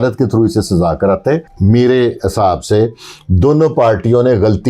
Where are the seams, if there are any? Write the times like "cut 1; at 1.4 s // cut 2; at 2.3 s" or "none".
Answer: cut 1; at 1.5 s

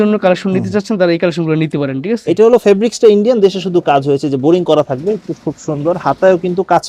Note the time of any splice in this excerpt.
none

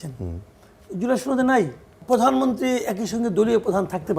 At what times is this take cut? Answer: cut 1; at 2.0 s

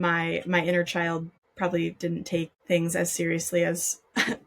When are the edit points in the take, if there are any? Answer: cut 1; at 1.4 s // cut 2; at 2.6 s

